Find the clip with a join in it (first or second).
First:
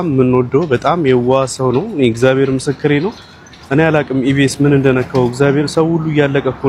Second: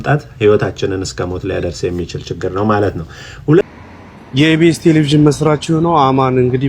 second